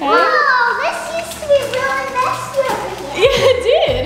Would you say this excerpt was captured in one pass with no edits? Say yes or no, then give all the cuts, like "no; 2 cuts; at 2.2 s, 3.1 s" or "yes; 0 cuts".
yes; 0 cuts